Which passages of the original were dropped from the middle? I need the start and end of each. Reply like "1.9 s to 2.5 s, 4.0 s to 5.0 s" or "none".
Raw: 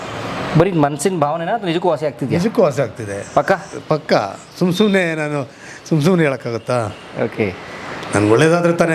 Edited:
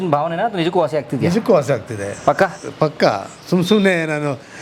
none